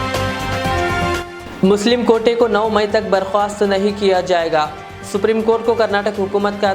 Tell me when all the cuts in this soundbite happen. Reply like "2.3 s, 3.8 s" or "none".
none